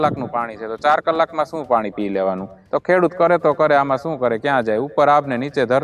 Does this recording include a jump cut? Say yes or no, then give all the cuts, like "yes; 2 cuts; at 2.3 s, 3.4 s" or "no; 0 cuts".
yes; 1 cut; at 2.5 s